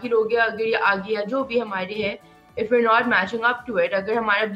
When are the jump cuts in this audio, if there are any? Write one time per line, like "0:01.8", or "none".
none